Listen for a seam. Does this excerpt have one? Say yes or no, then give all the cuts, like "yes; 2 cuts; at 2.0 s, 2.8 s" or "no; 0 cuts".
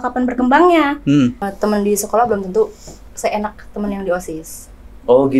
yes; 1 cut; at 1.4 s